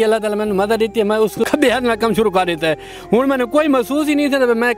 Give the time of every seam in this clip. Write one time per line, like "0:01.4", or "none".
0:01.4